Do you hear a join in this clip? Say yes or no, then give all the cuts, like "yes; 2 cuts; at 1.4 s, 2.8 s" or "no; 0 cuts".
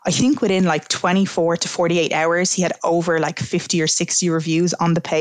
no; 0 cuts